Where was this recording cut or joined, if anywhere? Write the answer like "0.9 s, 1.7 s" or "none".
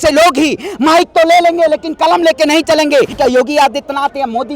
3.1 s